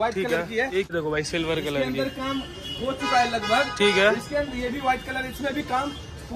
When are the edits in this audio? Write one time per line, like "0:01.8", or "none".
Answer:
0:00.9